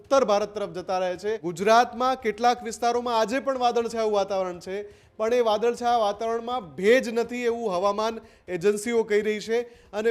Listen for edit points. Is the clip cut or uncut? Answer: cut